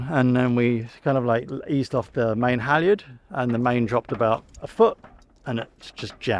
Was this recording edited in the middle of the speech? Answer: no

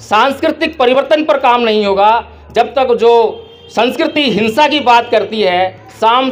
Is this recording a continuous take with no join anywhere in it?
yes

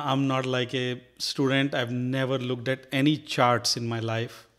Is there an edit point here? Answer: no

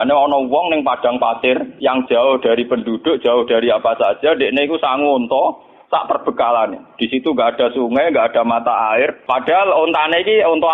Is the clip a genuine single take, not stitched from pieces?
no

